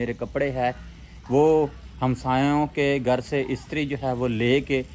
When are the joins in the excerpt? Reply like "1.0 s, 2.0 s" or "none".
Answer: none